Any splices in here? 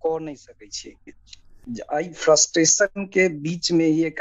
yes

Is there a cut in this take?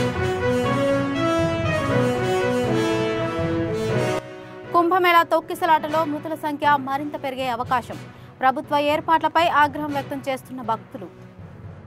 yes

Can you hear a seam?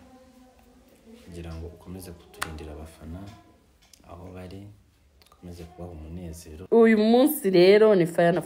yes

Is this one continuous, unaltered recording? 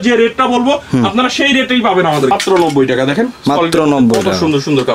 no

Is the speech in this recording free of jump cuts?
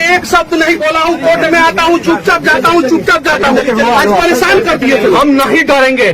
no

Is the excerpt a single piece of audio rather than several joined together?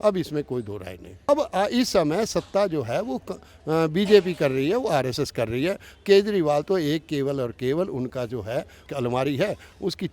no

